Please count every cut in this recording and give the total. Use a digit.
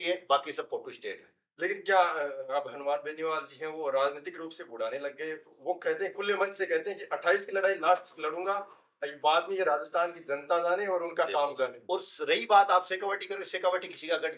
1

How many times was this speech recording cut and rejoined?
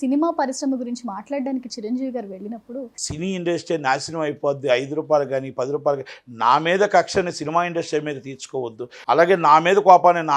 2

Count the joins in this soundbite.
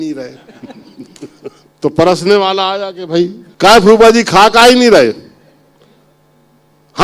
2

